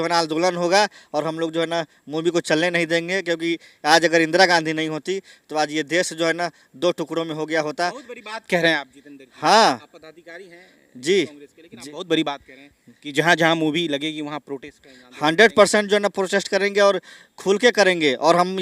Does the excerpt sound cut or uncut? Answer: uncut